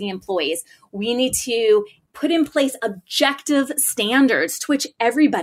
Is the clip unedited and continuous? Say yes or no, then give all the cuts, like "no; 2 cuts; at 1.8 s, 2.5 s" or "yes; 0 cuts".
no; 1 cut; at 2.0 s